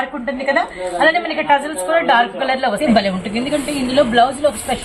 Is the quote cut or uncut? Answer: cut